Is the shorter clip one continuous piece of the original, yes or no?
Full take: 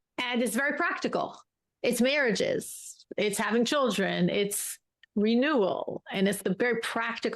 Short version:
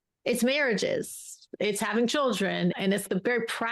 no